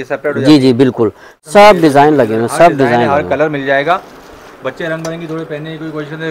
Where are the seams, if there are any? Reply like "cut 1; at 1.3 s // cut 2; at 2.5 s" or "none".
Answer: cut 1; at 1.3 s